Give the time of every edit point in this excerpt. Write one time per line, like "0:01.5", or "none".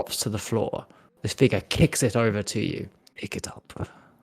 0:03.0